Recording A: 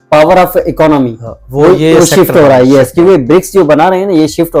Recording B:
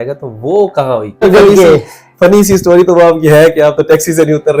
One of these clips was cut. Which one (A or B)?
B